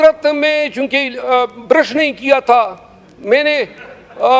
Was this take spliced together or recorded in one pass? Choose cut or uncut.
uncut